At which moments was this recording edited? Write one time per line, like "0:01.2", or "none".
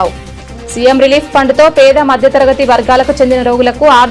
none